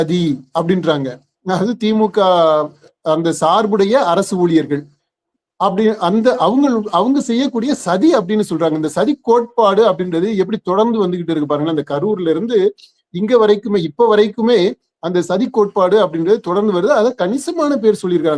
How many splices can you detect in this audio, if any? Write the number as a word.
zero